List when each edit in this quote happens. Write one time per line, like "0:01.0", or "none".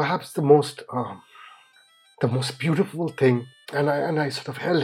0:03.6